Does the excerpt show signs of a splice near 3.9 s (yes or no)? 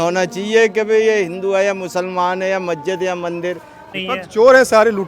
yes